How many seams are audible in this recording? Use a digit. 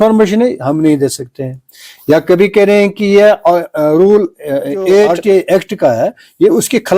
1